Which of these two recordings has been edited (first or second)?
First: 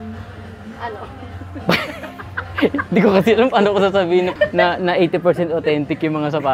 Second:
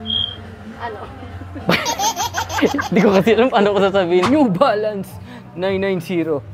second